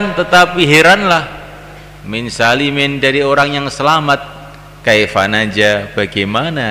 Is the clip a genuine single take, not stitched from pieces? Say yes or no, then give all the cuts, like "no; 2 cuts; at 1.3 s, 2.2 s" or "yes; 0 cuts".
yes; 0 cuts